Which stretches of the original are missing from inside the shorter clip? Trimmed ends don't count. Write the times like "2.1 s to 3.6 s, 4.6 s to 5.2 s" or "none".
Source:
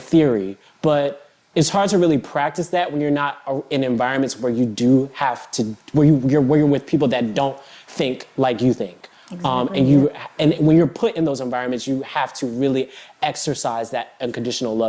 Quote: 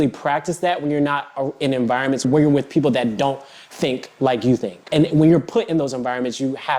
4.4 s to 6.4 s, 9.0 s to 10.3 s